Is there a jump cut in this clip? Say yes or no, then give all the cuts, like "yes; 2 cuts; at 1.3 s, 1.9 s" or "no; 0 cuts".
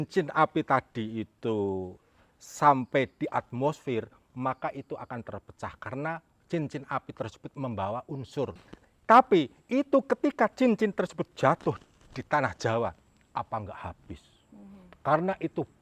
yes; 1 cut; at 8.6 s